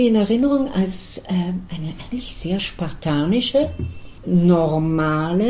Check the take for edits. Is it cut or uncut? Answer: uncut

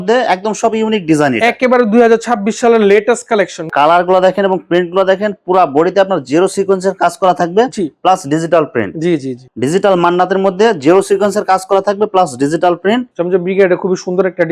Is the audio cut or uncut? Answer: cut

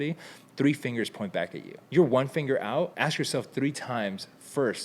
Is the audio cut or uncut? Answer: cut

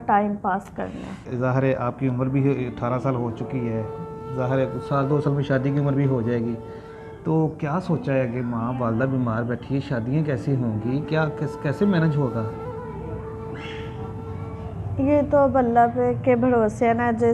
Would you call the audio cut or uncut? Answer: cut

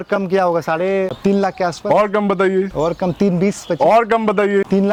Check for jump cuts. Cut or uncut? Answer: uncut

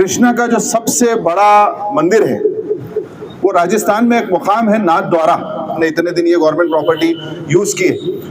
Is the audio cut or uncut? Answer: cut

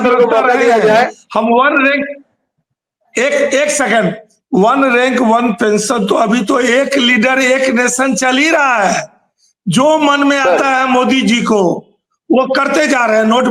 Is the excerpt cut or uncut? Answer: uncut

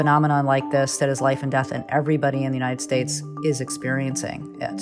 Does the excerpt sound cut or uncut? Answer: cut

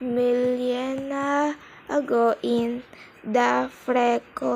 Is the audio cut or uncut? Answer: cut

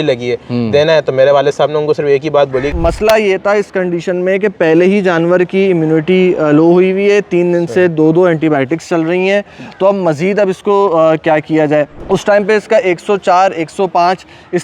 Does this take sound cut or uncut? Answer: cut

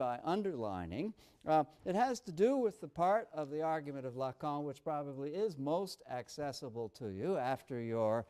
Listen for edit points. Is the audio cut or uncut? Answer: cut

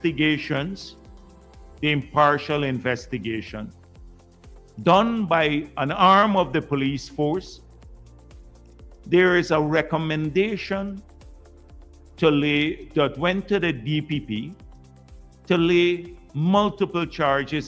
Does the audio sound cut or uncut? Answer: uncut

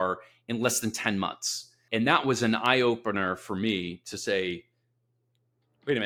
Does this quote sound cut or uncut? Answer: uncut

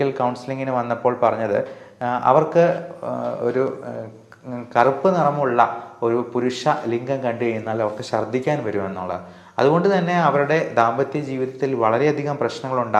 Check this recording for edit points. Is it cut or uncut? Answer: uncut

